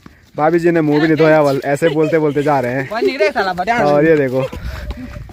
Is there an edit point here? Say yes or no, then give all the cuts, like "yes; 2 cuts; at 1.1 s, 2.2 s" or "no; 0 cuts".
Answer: no; 0 cuts